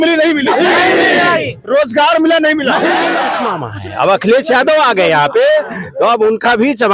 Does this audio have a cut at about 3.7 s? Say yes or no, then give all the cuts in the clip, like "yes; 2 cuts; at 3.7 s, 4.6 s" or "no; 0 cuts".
yes; 1 cut; at 3.7 s